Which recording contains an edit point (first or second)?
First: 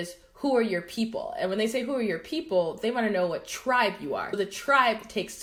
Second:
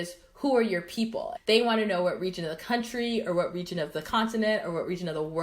second